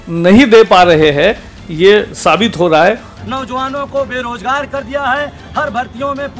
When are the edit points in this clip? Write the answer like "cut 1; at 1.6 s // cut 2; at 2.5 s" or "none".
cut 1; at 3.1 s